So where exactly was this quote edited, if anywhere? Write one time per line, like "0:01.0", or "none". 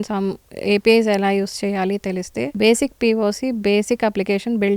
0:02.5

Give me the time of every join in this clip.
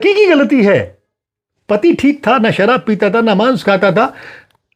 none

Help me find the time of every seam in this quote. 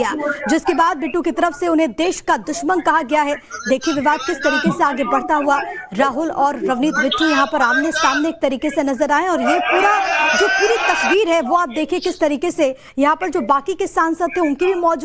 0:10.8

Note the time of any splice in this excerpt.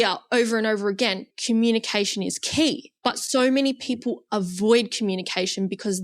0:01.3
0:02.9

